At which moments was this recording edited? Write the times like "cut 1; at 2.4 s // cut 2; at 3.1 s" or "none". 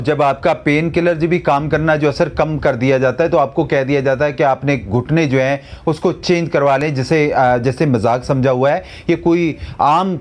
none